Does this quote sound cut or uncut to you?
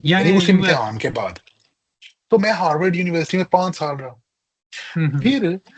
uncut